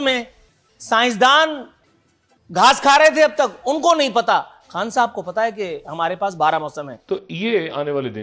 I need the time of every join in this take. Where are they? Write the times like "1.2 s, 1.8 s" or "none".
6.9 s